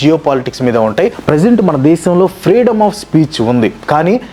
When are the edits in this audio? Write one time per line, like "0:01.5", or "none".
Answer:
0:01.2